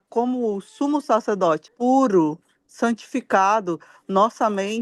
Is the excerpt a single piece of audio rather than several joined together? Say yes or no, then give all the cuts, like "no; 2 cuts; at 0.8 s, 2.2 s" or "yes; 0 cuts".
no; 1 cut; at 1.7 s